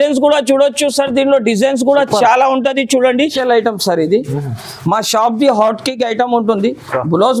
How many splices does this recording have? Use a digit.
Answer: 1